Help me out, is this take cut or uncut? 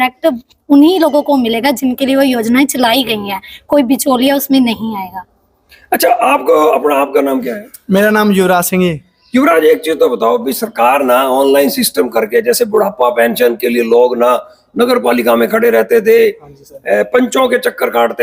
uncut